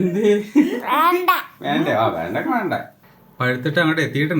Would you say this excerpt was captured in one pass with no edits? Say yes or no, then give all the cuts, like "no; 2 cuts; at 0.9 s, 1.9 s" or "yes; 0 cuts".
no; 1 cut; at 3.0 s